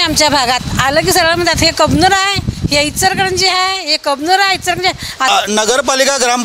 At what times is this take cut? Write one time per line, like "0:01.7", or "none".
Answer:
0:05.3